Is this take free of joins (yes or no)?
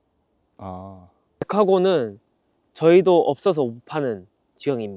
no